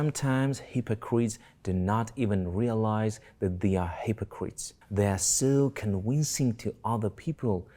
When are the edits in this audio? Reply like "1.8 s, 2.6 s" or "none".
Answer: none